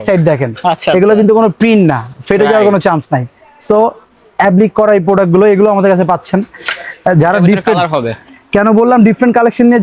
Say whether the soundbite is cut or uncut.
uncut